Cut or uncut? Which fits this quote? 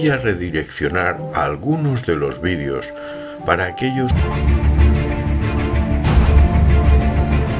uncut